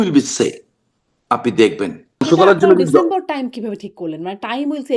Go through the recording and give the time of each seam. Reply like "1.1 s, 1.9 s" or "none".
2.3 s